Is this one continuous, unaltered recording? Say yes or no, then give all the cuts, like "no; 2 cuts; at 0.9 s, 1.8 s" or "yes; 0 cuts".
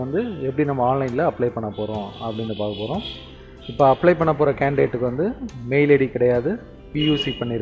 yes; 0 cuts